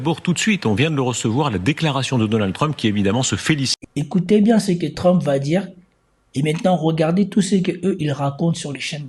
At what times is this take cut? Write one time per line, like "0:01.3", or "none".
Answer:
0:03.7

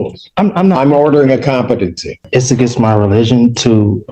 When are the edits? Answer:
0:02.2

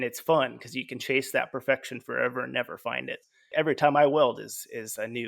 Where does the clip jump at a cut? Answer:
0:03.5

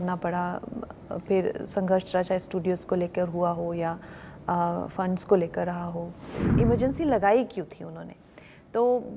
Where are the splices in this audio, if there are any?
0:06.4

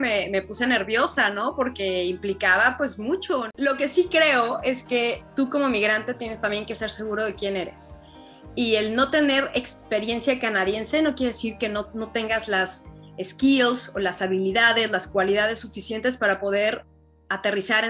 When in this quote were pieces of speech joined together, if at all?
0:03.5

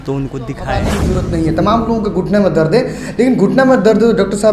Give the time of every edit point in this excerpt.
0:01.0

